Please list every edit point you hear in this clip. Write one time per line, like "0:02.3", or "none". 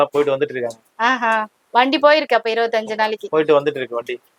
none

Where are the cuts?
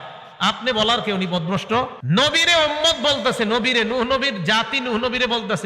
0:02.0

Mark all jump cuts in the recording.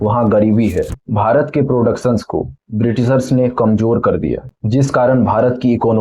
0:01.0
0:04.5

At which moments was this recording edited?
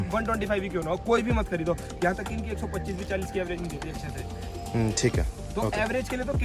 none

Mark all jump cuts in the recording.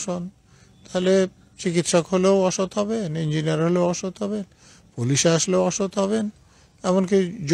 none

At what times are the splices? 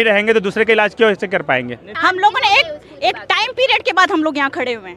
0:01.8

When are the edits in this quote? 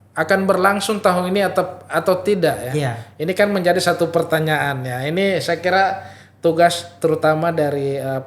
none

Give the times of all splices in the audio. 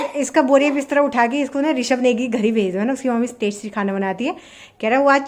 none

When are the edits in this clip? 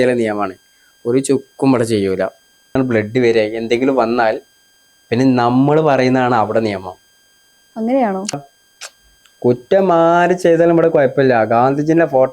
0:02.8
0:08.4

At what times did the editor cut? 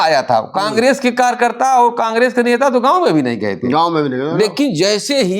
none

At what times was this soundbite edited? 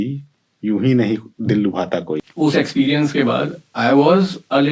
0:02.2

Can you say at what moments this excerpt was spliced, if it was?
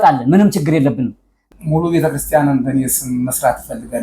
0:01.5

